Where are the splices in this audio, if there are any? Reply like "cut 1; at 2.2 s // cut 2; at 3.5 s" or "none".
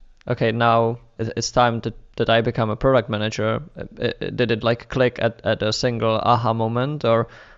cut 1; at 1.1 s